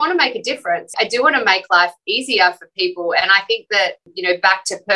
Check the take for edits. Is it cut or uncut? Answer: cut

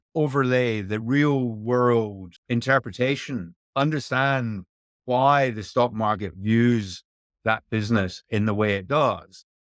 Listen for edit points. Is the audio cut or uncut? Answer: cut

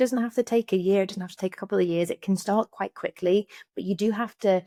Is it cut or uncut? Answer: uncut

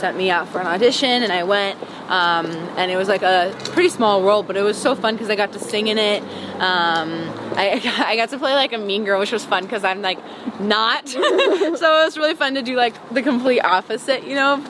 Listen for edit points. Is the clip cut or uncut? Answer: uncut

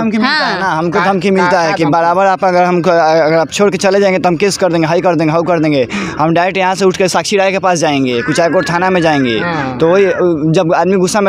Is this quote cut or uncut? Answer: uncut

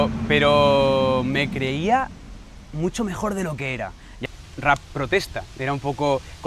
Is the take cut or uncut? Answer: cut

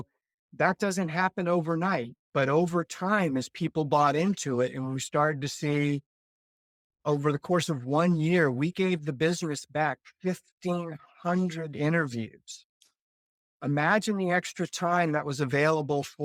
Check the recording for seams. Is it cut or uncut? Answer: uncut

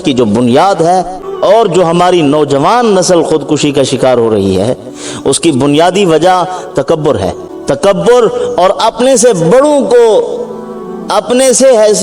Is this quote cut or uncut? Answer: cut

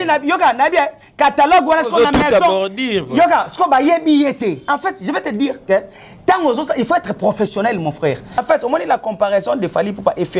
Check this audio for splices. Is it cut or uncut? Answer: cut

